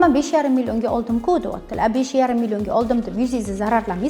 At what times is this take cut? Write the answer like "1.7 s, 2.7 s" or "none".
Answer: none